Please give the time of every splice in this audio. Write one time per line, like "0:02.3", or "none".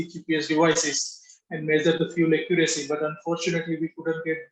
none